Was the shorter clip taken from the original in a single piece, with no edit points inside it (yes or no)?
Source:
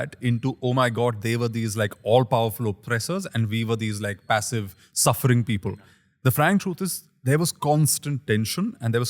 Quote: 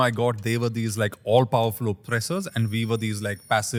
yes